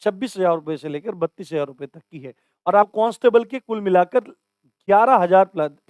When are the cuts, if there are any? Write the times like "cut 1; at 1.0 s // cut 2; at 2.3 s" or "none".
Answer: cut 1; at 2.9 s